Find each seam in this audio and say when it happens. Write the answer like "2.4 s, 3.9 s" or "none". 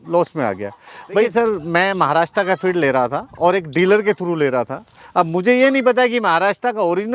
1.3 s